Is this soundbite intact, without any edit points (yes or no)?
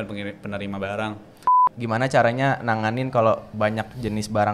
no